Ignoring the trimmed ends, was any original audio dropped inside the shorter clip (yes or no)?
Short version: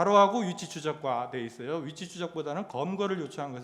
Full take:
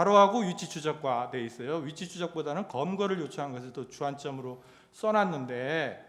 no